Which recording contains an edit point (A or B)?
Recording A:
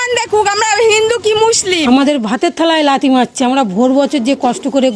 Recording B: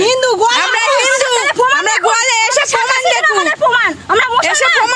A